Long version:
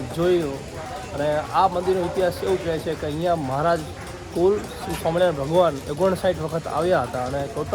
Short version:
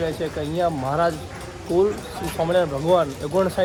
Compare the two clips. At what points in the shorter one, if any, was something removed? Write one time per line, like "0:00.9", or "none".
none